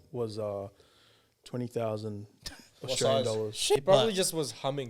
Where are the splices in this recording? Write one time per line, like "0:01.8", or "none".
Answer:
0:03.8